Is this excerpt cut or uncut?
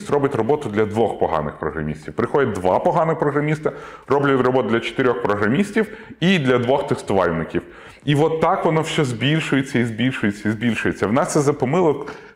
uncut